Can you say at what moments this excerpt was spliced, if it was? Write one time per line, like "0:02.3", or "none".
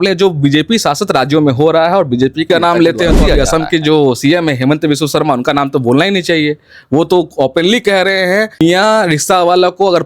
0:02.5
0:08.6

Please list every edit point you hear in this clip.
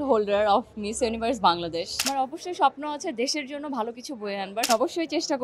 0:02.1
0:04.7

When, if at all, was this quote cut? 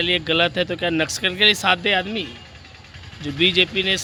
none

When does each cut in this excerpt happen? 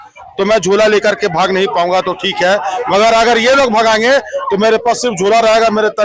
none

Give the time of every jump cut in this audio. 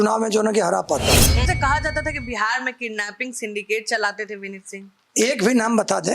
0:01.5

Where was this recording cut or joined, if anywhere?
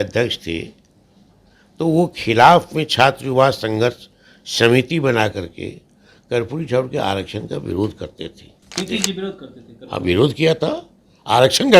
0:08.8

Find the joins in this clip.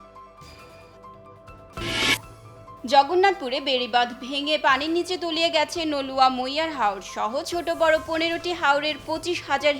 0:01.7

